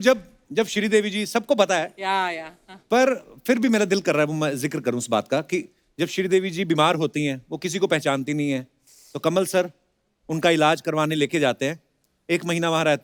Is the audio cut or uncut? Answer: uncut